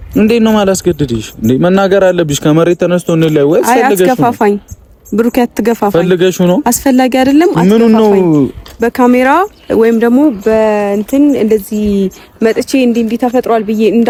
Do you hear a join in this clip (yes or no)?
no